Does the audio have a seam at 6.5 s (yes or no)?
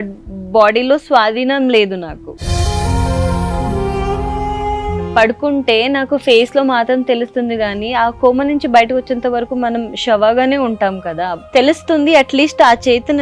no